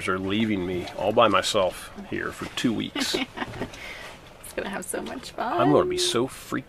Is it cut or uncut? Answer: uncut